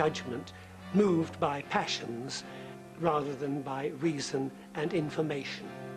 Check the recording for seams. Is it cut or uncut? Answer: cut